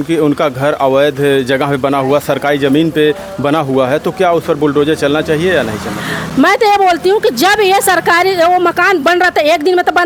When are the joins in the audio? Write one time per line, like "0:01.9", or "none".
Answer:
none